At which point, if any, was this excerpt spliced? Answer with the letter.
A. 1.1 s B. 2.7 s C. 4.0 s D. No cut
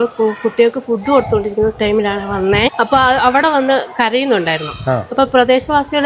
B